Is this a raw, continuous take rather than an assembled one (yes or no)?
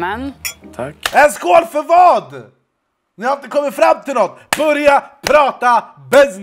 yes